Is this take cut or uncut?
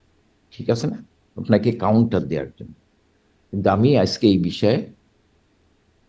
uncut